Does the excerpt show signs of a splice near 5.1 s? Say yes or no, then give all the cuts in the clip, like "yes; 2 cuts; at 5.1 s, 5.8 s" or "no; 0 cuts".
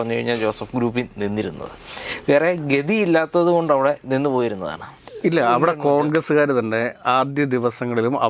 yes; 1 cut; at 5.1 s